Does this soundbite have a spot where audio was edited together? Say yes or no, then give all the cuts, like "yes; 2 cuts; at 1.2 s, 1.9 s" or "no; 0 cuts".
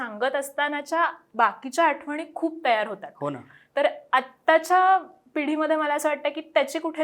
no; 0 cuts